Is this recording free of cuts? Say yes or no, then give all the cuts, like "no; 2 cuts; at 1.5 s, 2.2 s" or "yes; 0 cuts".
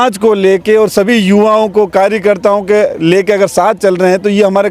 yes; 0 cuts